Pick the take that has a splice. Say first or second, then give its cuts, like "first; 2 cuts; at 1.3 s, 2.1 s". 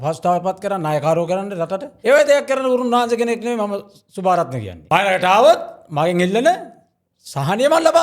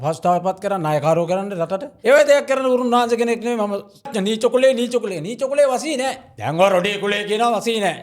second; 1 cut; at 4.1 s